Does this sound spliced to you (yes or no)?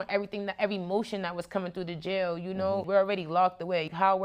yes